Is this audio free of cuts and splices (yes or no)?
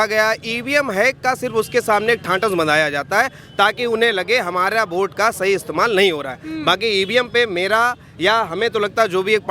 yes